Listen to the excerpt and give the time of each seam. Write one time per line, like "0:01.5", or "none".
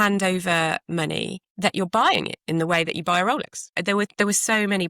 0:01.4
0:03.7